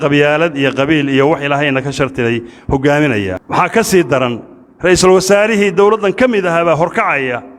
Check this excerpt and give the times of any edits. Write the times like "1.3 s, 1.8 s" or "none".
3.4 s